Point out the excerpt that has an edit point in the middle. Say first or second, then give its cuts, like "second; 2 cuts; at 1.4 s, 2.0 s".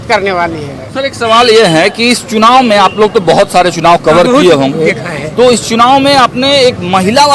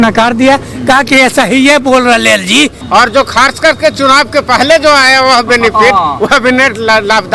second; 1 cut; at 2.8 s